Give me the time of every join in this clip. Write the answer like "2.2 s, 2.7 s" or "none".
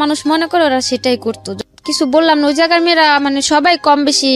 1.5 s